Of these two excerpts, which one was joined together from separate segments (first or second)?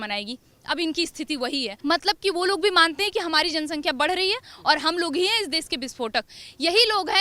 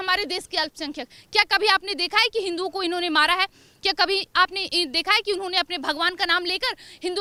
first